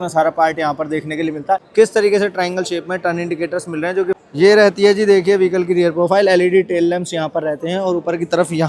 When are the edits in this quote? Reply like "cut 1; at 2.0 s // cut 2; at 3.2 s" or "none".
cut 1; at 1.7 s // cut 2; at 4.2 s